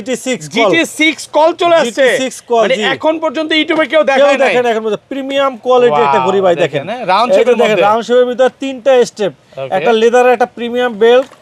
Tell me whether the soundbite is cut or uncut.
uncut